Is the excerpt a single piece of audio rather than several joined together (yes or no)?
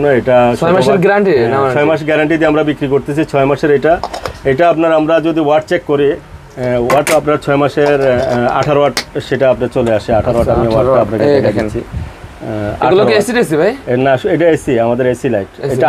yes